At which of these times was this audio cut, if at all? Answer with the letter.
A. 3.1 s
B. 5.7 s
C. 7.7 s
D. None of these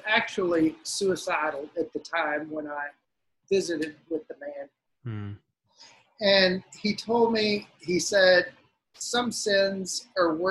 D